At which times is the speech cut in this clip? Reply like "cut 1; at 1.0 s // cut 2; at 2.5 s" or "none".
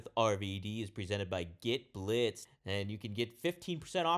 cut 1; at 2.5 s